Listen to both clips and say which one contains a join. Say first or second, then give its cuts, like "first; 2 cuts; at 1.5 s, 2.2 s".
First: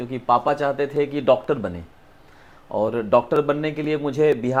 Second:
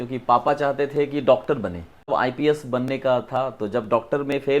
second; 1 cut; at 2.1 s